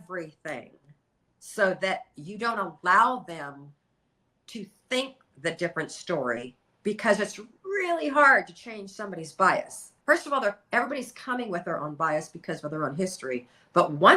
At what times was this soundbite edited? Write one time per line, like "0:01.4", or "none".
none